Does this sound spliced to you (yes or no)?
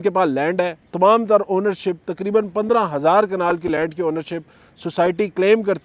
no